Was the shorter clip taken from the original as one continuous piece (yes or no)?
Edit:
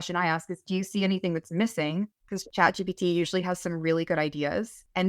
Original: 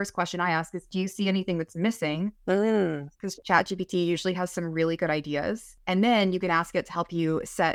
no